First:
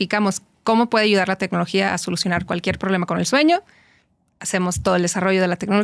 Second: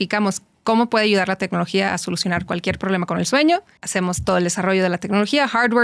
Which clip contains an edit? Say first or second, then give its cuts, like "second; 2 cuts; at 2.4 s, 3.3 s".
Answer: second; 1 cut; at 3.8 s